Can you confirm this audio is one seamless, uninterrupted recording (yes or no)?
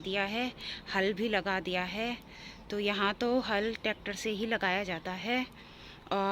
yes